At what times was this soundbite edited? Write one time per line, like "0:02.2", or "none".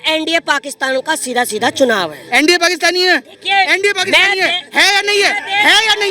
0:02.2